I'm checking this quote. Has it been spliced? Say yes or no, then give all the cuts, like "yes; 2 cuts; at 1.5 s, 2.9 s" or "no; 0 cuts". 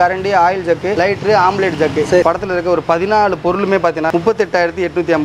yes; 3 cuts; at 0.9 s, 2.2 s, 4.1 s